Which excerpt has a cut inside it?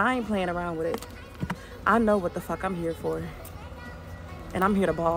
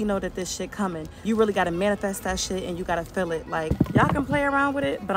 second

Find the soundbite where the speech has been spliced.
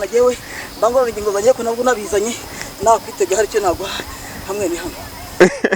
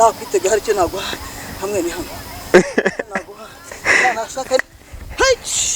second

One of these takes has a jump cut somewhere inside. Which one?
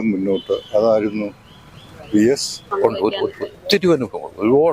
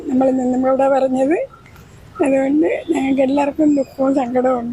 first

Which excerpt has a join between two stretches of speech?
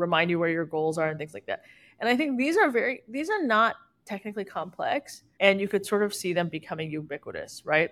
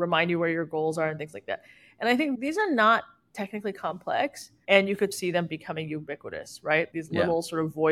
second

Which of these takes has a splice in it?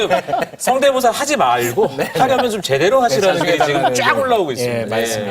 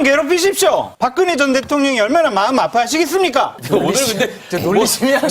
second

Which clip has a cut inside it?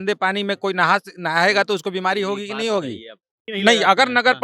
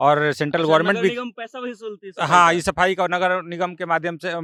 first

